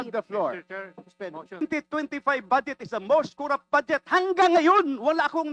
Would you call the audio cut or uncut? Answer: cut